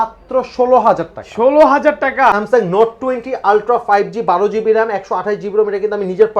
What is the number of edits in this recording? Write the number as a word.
one